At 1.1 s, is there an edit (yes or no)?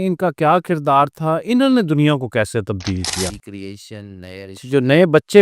no